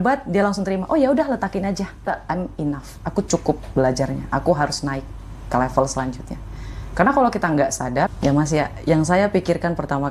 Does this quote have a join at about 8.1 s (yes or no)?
yes